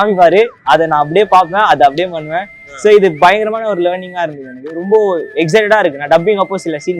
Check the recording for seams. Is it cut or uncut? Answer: uncut